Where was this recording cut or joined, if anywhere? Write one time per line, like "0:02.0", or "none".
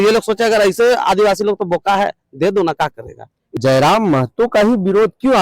0:03.4